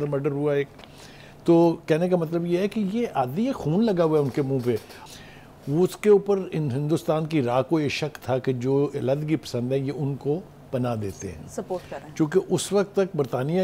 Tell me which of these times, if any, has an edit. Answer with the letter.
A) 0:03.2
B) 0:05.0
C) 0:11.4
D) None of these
B